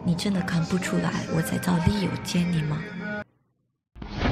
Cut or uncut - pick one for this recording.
uncut